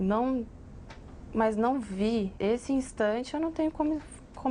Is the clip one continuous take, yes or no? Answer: no